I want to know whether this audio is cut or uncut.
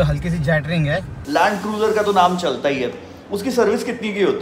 cut